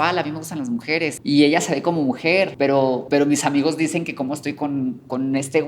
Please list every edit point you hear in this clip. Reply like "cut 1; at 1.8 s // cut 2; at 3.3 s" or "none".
cut 1; at 1.2 s // cut 2; at 2.9 s